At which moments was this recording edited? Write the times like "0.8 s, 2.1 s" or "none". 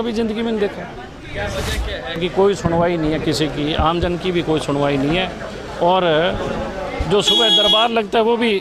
2.2 s